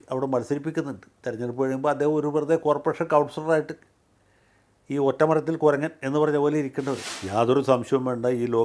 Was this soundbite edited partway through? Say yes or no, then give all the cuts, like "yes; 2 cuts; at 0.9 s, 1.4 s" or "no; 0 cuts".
yes; 1 cut; at 7.1 s